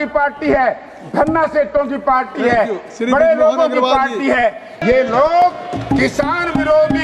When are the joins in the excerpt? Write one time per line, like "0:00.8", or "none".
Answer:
0:04.7